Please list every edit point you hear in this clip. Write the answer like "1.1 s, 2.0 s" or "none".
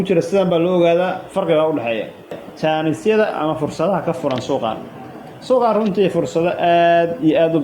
2.5 s